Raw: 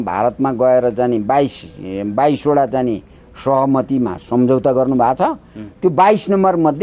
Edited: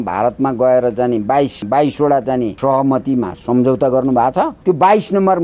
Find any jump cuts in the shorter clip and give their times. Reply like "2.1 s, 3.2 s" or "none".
1.6 s, 2.5 s, 4.5 s